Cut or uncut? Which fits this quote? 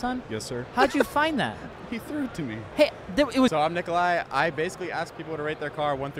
cut